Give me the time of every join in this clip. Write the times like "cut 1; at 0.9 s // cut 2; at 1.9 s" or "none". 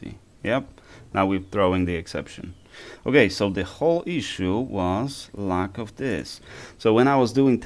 none